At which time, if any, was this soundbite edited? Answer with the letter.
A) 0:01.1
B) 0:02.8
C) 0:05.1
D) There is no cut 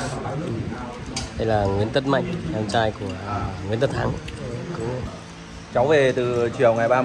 C